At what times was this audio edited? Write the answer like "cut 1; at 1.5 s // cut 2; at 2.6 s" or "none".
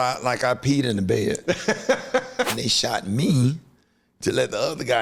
cut 1; at 2.5 s